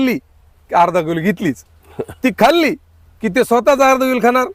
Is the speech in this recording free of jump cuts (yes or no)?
yes